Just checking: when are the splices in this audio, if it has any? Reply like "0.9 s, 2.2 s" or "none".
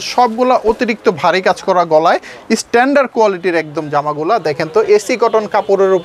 none